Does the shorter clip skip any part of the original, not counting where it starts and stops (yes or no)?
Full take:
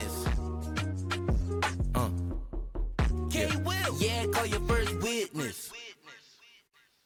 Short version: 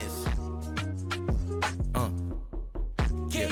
no